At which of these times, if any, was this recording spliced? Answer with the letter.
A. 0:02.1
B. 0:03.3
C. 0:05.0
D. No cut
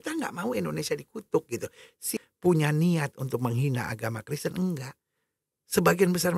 A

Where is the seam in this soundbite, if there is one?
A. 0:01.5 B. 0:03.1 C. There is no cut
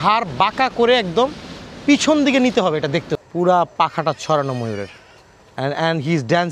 B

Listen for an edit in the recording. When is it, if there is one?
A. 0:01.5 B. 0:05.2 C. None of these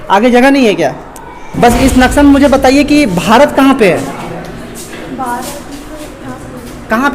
A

